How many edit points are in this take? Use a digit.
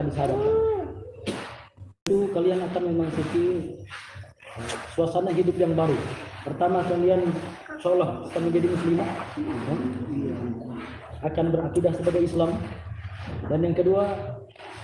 1